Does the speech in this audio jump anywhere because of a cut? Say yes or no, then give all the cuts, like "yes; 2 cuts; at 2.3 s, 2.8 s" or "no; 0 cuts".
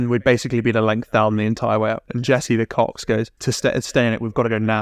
yes; 2 cuts; at 2.1 s, 3.3 s